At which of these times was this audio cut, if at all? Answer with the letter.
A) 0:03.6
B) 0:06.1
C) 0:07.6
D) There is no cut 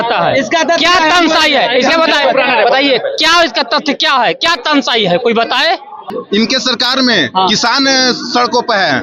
B